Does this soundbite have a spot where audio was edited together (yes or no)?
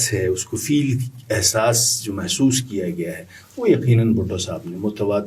no